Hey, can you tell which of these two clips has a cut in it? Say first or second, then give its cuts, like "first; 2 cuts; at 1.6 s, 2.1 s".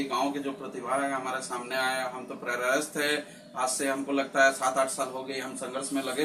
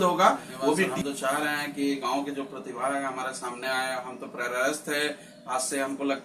second; 1 cut; at 0.9 s